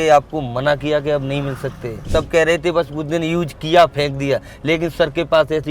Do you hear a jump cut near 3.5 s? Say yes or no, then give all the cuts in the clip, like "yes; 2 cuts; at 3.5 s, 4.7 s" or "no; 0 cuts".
no; 1 cut; at 2.0 s